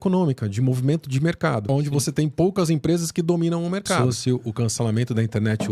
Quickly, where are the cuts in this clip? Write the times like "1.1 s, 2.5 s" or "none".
1.6 s, 4.0 s